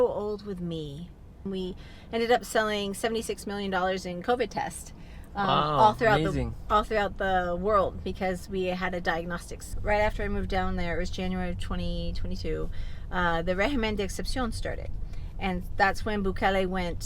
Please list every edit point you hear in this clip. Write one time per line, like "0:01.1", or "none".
0:01.4
0:09.7

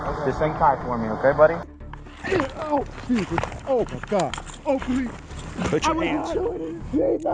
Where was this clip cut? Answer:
0:01.7

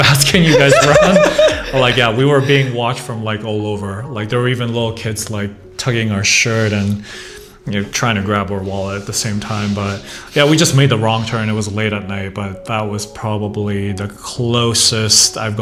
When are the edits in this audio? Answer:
none

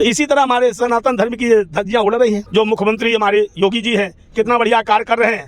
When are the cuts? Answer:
0:02.4

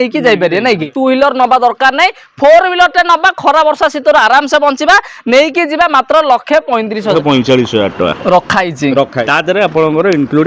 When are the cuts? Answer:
0:00.9
0:07.1
0:09.2

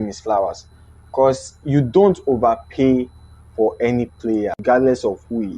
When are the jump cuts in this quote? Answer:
0:04.6

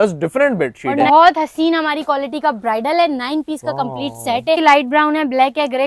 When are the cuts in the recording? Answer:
0:01.0
0:04.6

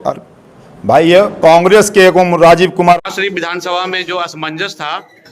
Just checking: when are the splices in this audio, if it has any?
0:03.0

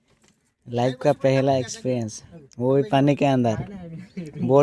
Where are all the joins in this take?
none

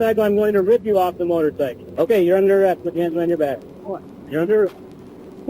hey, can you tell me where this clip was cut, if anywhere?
0:01.8

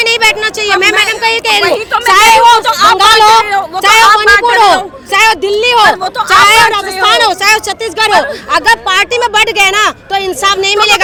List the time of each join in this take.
none

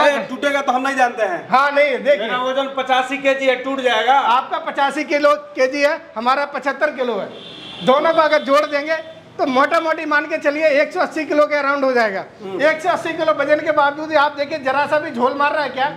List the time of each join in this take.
none

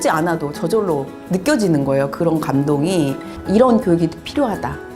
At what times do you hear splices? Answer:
0:01.2
0:03.3

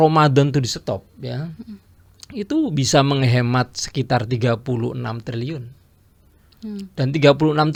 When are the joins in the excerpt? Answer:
none

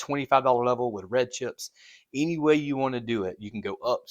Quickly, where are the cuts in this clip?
none

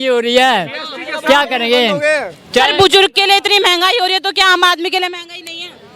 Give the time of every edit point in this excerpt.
none

